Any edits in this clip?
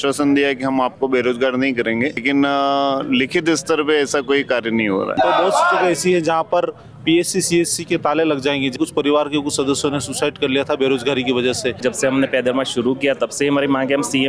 yes; 3 cuts; at 5.2 s, 8.8 s, 11.8 s

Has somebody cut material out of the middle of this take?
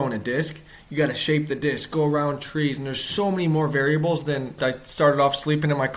yes; 1 cut; at 4.6 s

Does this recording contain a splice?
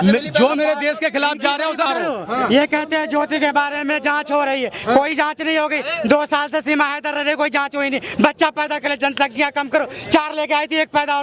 yes; 1 cut; at 1.9 s

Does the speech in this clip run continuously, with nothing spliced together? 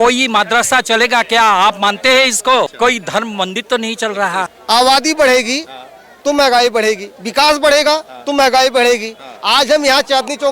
no; 2 cuts; at 2.7 s, 4.5 s

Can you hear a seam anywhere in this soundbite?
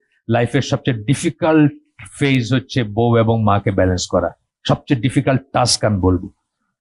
no; 0 cuts

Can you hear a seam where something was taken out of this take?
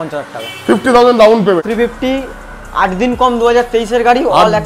yes; 1 cut; at 1.6 s

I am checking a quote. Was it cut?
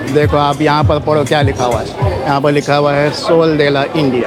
no; 0 cuts

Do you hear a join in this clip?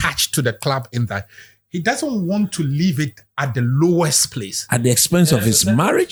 no; 0 cuts

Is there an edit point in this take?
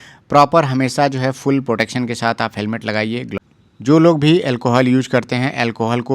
yes; 1 cut; at 3.4 s

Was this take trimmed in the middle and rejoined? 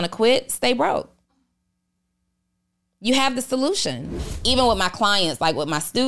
yes; 1 cut; at 4.1 s

